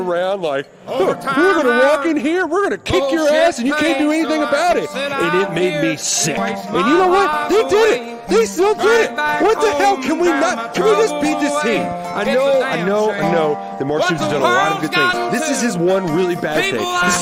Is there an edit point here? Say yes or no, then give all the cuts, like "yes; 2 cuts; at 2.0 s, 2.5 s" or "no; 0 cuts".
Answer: no; 0 cuts